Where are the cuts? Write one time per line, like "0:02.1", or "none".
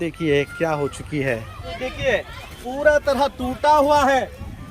0:01.7